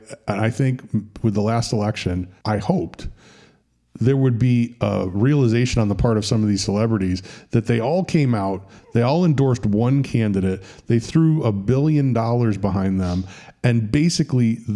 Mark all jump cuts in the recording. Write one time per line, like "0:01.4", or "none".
0:02.3